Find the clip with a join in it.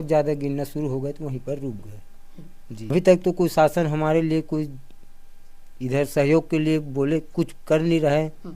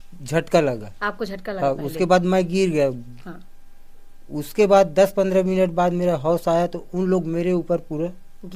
first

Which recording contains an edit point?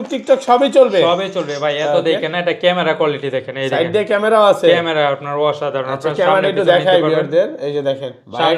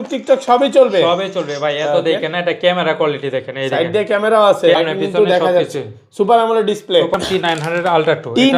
second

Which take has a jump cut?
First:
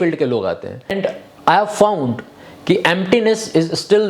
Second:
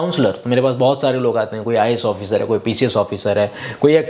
first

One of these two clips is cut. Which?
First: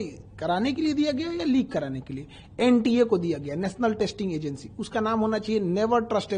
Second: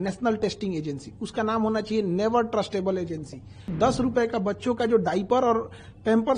second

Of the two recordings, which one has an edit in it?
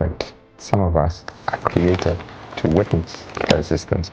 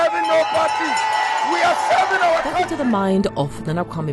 second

